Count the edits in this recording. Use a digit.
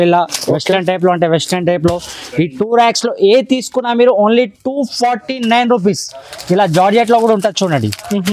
0